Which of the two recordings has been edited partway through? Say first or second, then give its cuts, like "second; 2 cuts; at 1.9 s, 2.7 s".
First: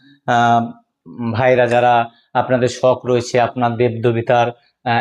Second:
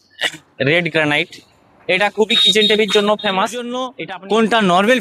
second; 1 cut; at 4.0 s